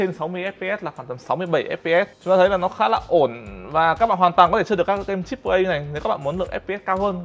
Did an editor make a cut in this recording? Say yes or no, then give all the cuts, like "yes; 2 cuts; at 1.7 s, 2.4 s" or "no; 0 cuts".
yes; 1 cut; at 2.2 s